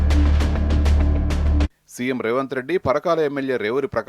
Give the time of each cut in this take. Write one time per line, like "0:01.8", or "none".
0:01.4